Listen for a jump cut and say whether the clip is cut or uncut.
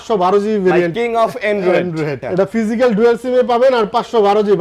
cut